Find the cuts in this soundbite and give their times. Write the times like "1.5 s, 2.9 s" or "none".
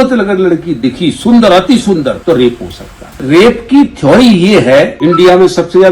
2.2 s, 3.1 s, 4.9 s